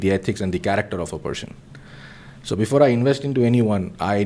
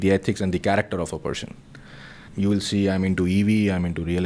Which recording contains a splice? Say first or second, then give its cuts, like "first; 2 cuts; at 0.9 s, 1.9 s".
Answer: second; 1 cut; at 2.2 s